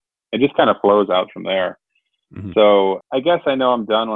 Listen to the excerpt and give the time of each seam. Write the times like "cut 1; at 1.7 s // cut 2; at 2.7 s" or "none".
cut 1; at 3.0 s